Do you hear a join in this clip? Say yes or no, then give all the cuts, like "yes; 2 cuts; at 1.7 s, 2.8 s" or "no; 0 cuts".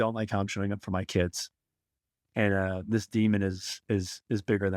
no; 0 cuts